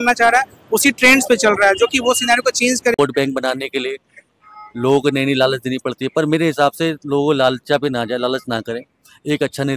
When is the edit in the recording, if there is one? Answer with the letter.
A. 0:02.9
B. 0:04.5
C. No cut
A